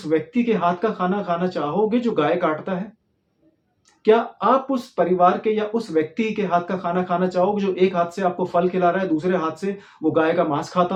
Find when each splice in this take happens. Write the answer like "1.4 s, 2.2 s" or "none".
none